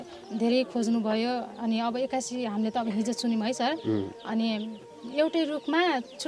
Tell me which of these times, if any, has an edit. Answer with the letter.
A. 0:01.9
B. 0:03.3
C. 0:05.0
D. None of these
C